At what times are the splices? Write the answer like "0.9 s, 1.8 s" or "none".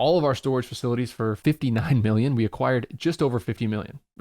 1.4 s